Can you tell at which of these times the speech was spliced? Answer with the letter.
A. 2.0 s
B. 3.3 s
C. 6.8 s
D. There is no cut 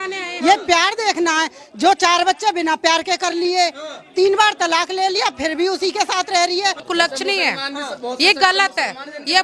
C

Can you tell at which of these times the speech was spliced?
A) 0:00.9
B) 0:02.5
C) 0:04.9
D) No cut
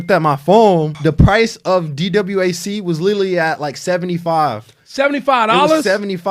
A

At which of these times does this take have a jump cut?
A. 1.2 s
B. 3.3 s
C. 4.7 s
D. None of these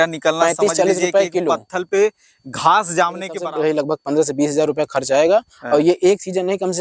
B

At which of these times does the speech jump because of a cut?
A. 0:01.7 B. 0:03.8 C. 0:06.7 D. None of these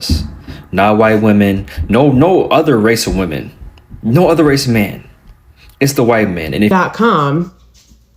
C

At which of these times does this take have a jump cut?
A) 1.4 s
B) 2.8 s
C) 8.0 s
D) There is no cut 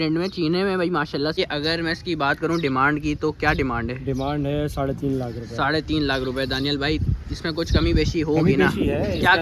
A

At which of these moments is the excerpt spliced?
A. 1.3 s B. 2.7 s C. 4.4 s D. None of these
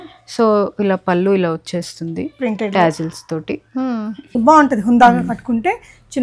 C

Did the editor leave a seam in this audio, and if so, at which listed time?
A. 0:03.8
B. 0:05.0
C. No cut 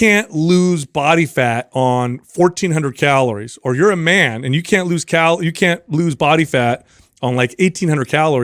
C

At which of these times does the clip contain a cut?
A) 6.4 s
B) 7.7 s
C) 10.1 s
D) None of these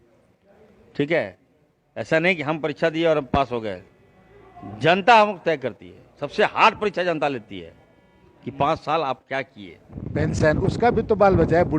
C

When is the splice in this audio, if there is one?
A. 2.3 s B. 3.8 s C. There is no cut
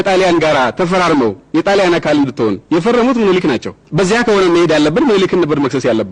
B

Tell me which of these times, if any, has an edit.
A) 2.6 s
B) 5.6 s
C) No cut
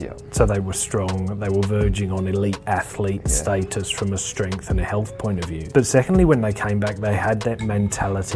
B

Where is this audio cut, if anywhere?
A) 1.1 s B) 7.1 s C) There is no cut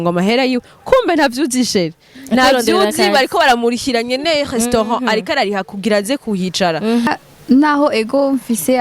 B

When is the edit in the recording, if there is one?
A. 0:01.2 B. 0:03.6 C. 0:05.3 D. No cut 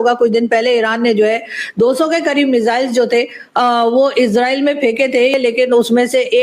C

